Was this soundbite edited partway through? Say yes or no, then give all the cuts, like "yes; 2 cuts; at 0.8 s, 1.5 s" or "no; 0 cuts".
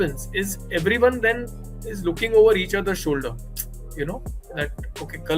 no; 0 cuts